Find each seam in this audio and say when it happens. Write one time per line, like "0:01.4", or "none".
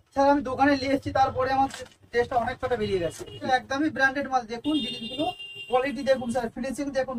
0:03.4